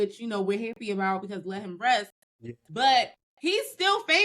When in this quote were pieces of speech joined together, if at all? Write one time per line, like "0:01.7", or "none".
0:03.2